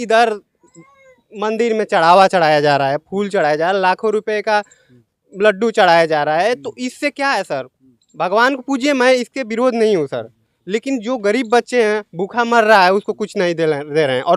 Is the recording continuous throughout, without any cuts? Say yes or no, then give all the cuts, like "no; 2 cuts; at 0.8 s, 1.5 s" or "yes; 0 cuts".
yes; 0 cuts